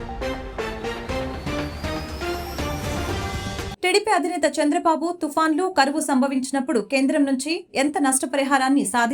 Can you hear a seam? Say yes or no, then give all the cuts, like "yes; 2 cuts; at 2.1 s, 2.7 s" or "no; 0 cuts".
no; 0 cuts